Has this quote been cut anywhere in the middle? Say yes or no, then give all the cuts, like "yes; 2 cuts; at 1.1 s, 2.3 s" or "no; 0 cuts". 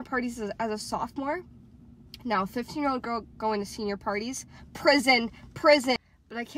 no; 0 cuts